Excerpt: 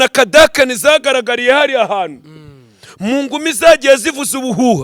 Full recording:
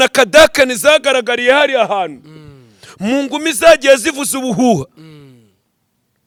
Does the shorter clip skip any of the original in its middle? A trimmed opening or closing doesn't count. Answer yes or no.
no